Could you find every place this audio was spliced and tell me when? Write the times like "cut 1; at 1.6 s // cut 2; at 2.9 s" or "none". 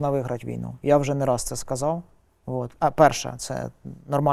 none